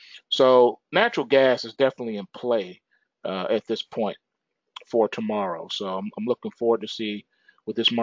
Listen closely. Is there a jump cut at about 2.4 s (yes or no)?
yes